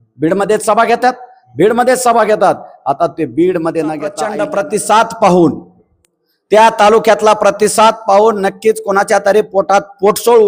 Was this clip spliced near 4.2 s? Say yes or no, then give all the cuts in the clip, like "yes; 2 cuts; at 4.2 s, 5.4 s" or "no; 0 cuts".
yes; 1 cut; at 4.2 s